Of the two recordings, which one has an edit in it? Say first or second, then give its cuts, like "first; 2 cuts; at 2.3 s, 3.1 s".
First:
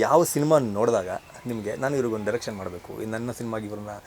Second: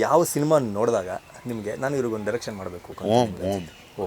second; 1 cut; at 2.9 s